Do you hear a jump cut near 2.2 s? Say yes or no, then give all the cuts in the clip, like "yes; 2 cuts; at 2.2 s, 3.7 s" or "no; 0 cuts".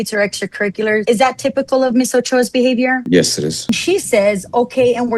no; 2 cuts; at 1.0 s, 3.7 s